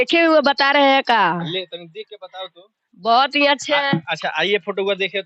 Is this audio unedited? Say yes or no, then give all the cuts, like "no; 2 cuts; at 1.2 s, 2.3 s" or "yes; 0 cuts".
yes; 0 cuts